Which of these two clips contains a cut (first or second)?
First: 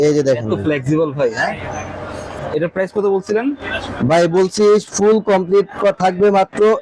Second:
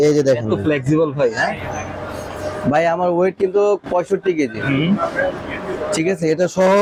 first